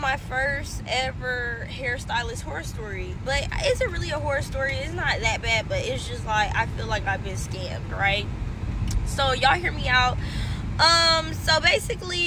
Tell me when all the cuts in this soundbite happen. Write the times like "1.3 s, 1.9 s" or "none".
none